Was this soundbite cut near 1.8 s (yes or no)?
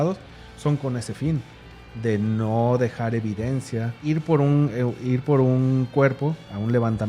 no